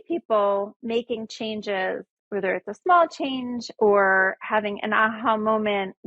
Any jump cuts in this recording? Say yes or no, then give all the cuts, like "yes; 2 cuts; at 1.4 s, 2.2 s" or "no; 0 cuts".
yes; 1 cut; at 2.1 s